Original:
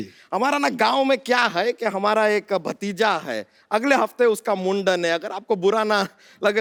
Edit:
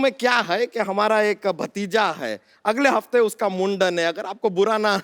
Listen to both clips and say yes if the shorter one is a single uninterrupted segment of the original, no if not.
yes